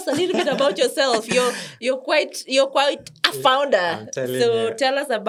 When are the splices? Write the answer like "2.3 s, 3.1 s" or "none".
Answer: none